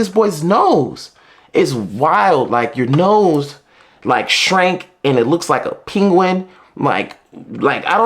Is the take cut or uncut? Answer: uncut